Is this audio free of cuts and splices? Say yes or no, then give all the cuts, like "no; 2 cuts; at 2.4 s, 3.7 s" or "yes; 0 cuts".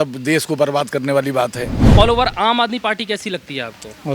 no; 1 cut; at 1.8 s